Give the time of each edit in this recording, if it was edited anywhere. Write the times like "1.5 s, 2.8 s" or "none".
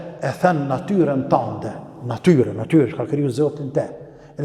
none